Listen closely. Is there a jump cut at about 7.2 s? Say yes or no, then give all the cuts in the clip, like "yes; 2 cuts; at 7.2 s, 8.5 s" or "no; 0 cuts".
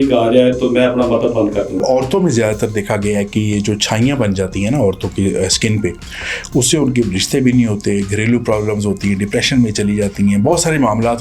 no; 1 cut; at 1.8 s